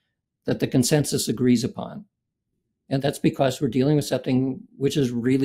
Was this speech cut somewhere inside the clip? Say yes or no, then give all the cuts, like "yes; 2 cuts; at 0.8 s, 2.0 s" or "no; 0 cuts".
yes; 1 cut; at 3.0 s